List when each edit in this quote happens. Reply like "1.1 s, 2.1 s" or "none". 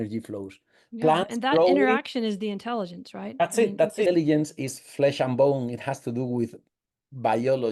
4.0 s